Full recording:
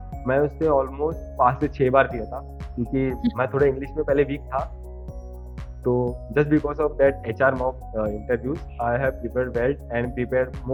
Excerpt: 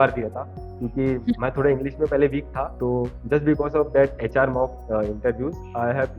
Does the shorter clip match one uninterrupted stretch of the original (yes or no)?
no